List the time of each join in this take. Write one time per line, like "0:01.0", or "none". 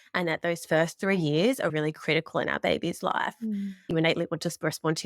0:03.9